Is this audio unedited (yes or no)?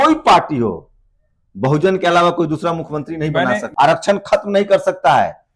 no